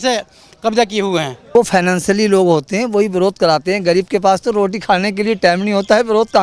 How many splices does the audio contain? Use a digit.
1